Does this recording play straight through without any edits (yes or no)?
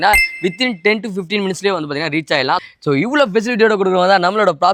yes